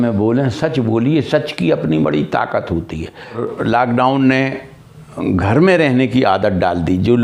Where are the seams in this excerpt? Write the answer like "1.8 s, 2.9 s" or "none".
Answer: 3.4 s